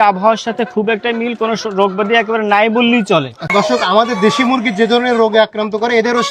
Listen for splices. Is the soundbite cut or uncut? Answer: cut